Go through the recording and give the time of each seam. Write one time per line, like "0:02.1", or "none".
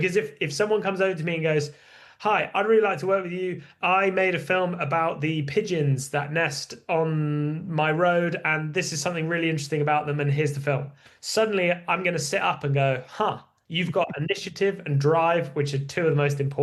none